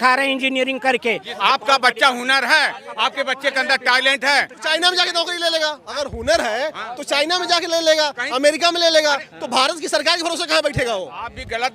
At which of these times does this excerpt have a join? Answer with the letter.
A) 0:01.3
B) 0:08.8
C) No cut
A